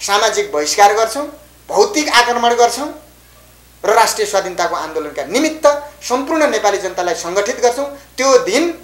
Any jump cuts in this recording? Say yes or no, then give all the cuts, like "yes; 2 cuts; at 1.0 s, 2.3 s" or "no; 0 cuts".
no; 0 cuts